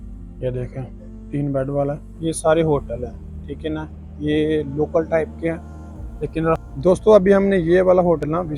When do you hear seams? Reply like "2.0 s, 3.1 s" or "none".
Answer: 2.1 s, 6.6 s